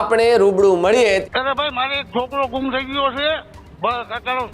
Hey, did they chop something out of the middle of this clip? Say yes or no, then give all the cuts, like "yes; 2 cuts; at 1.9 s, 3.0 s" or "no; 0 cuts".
yes; 1 cut; at 1.2 s